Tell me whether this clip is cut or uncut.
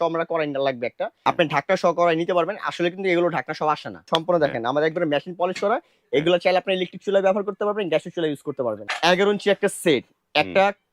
cut